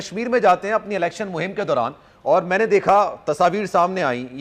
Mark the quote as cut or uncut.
uncut